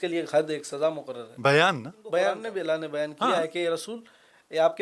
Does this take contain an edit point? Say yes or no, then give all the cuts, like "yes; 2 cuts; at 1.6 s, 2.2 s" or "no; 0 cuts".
yes; 1 cut; at 2.4 s